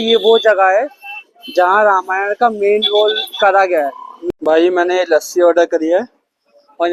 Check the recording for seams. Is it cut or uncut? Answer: cut